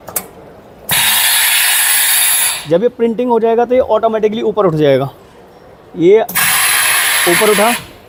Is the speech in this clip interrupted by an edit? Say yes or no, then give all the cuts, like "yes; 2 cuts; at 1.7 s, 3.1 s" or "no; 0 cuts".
no; 0 cuts